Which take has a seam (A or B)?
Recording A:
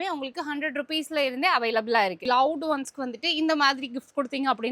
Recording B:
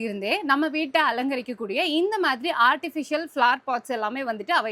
A